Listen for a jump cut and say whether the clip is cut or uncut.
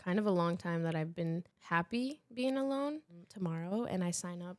cut